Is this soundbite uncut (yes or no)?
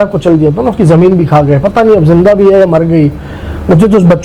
yes